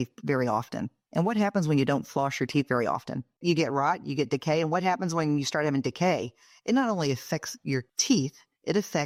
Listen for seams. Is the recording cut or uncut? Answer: uncut